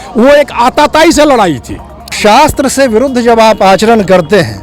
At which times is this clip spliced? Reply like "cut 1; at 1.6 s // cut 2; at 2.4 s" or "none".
cut 1; at 2.1 s